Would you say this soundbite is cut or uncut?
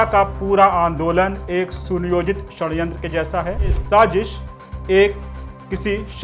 cut